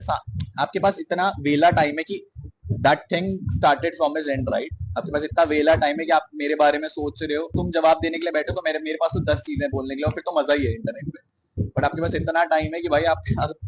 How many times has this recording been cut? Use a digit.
1